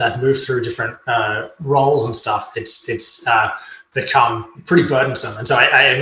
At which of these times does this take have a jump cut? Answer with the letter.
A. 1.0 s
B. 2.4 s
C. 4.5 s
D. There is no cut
C